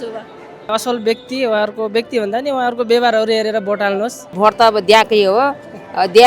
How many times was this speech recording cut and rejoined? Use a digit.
2